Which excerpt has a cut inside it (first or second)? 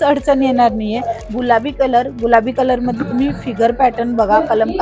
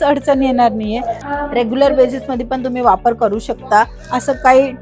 first